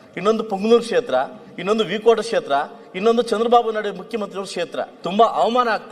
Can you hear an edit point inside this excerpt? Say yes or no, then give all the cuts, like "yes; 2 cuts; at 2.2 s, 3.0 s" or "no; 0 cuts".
yes; 1 cut; at 4.9 s